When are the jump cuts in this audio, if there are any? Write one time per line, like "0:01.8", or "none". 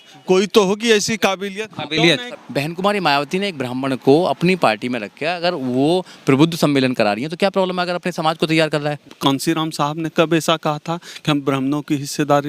0:02.3
0:09.0